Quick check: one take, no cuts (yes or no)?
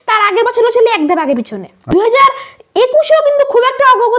no